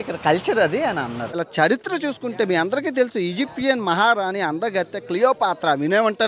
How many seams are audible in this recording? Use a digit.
1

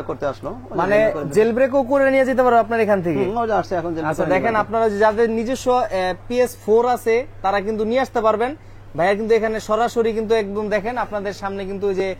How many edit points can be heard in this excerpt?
0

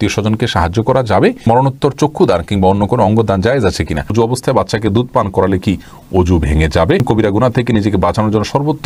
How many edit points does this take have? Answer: 3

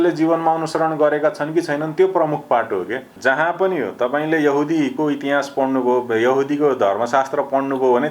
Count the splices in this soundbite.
1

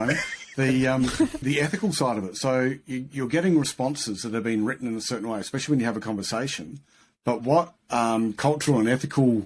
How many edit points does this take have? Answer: 1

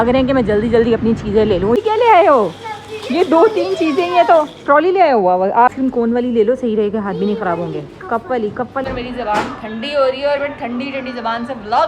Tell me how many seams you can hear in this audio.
3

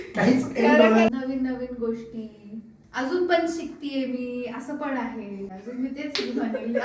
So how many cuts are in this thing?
2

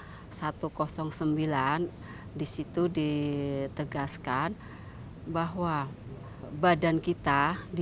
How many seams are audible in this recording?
1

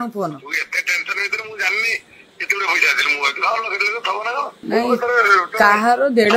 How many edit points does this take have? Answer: 1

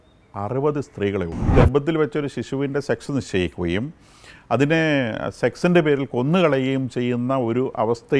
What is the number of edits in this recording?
1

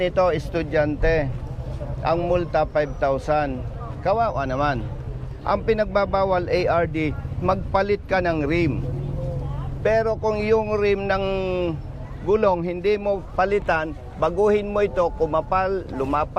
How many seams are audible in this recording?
0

